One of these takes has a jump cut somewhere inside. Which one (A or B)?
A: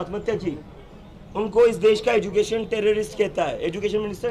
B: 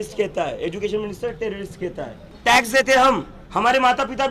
B